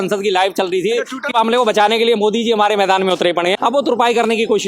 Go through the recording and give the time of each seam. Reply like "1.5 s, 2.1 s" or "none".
1.3 s, 3.6 s